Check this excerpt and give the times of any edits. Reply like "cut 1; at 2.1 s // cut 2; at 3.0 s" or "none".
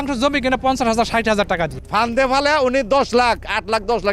cut 1; at 1.8 s